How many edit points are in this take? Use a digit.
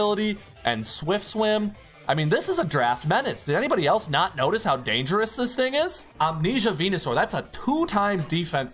1